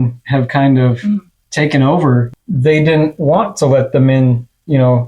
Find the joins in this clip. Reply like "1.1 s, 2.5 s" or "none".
2.3 s